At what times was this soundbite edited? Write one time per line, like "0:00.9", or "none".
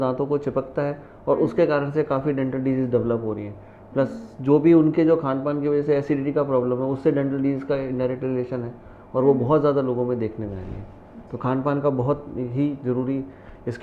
none